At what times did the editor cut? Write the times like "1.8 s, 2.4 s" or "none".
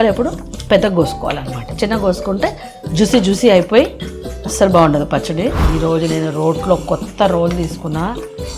5.6 s

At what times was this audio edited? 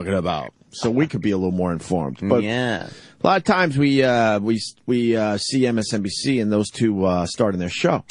6.8 s

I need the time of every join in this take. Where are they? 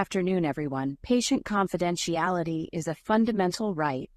none

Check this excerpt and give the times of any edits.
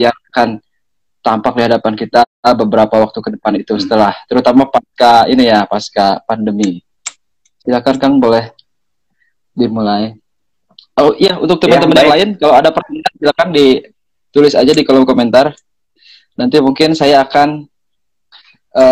none

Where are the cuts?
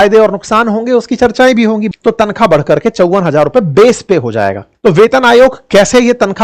1.8 s, 4.6 s

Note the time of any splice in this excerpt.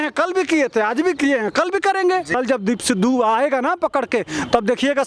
2.3 s

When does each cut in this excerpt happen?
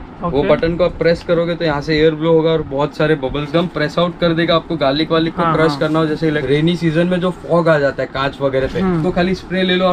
3.5 s, 6.2 s, 9.0 s

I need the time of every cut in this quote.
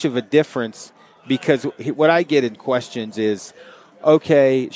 none

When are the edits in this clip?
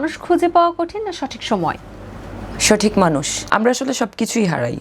3.5 s

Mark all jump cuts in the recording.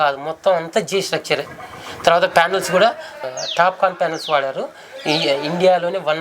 3.2 s

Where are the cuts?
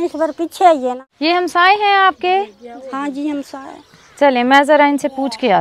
1.1 s

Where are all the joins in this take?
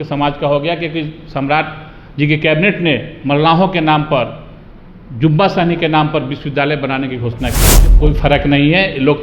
7.8 s

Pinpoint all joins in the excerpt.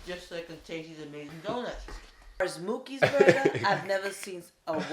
2.4 s

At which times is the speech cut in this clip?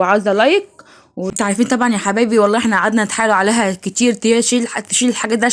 1.2 s

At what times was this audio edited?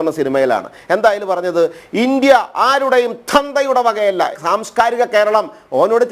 4.4 s

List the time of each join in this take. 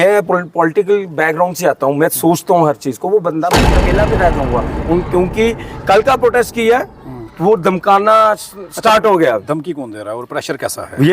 3.7 s

